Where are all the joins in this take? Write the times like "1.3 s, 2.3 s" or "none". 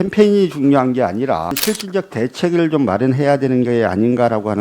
1.5 s